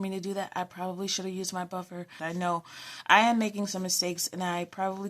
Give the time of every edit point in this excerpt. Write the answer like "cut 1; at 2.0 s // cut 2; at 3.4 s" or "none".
cut 1; at 2.1 s

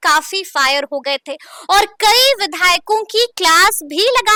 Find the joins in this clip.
none

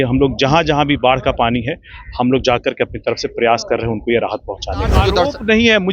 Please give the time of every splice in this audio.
cut 1; at 5.0 s

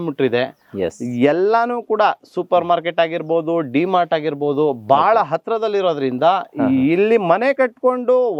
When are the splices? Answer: none

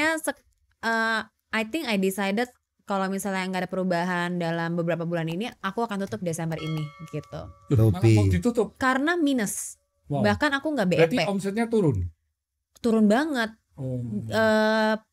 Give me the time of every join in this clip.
none

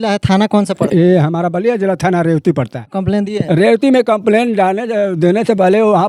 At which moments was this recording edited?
cut 1; at 2.9 s

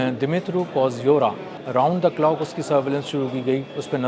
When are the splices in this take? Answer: cut 1; at 1.6 s

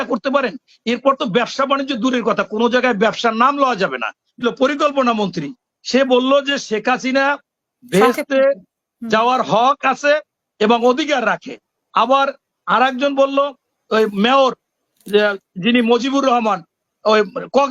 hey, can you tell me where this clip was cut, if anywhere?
cut 1; at 4.4 s

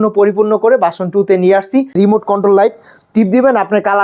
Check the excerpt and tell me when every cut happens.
cut 1; at 2.0 s

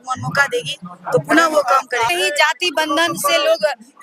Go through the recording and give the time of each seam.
cut 1; at 2.1 s

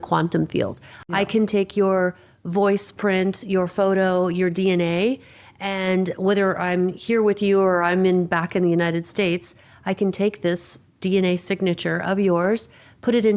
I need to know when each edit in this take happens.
none

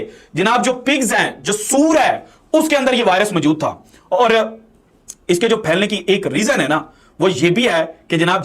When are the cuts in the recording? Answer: none

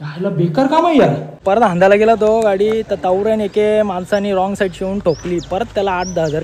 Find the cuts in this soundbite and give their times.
cut 1; at 1.4 s

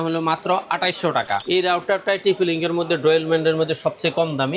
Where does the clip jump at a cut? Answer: cut 1; at 1.4 s

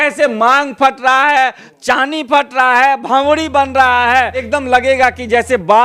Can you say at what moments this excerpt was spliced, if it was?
cut 1; at 4.5 s

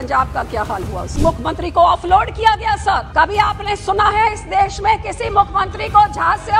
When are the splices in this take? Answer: cut 1; at 1.1 s // cut 2; at 3.1 s

